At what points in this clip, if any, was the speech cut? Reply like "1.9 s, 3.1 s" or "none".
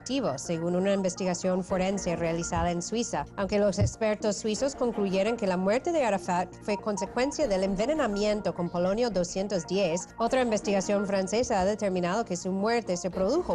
4.4 s